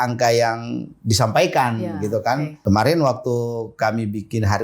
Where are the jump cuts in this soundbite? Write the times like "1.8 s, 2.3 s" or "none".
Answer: 2.6 s